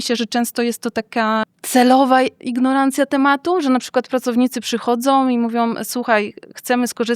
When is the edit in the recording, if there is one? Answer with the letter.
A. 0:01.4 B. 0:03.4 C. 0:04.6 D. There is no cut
A